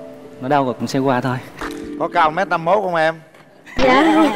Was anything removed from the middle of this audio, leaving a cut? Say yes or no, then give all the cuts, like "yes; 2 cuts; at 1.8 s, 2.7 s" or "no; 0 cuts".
yes; 1 cut; at 1.6 s